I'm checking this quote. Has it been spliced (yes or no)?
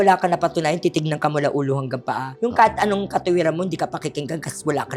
no